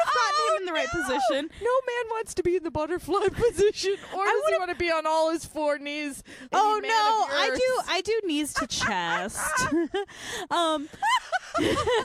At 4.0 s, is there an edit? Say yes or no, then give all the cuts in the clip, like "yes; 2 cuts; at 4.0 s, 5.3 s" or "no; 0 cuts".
no; 1 cut; at 6.3 s